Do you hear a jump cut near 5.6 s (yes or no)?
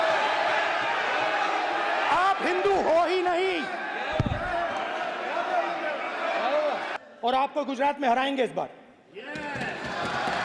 no